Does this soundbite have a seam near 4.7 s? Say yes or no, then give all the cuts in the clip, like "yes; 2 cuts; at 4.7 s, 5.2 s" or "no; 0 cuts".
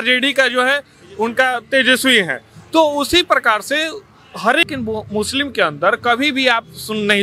yes; 1 cut; at 4.7 s